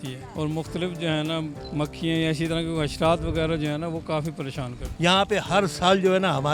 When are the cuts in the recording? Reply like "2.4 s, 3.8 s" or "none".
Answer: 1.6 s, 4.8 s